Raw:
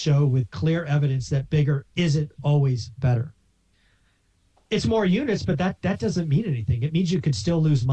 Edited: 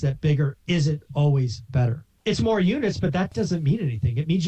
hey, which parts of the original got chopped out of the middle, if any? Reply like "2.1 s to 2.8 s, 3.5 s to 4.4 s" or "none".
3.4 s to 4.5 s, 5.8 s to 6.0 s